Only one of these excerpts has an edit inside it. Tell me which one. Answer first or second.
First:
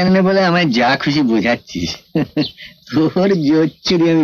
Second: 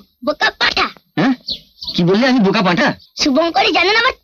second